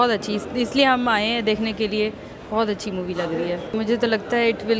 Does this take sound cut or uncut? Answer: cut